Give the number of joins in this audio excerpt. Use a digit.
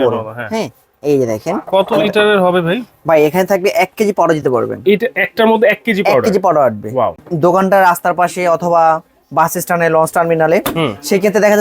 1